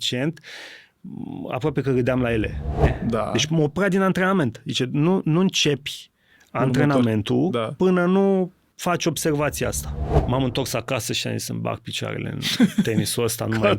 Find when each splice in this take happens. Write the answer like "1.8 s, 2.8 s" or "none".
2.9 s, 10.2 s